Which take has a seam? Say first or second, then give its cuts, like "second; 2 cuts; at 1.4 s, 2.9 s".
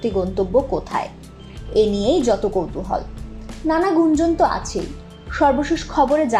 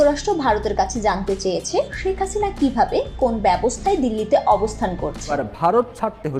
second; 1 cut; at 5.4 s